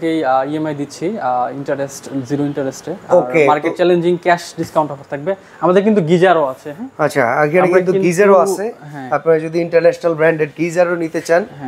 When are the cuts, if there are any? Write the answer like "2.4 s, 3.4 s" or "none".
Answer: none